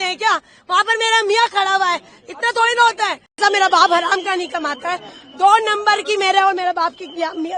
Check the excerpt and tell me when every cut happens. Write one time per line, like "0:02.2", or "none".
0:03.4